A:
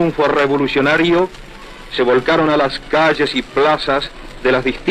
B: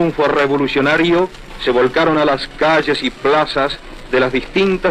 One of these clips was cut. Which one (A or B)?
B